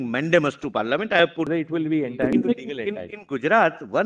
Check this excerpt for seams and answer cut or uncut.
cut